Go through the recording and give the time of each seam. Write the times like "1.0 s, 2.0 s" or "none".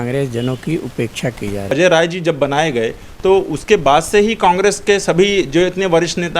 1.7 s